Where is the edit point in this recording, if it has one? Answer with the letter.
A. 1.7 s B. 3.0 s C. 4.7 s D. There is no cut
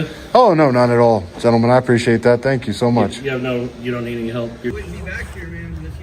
C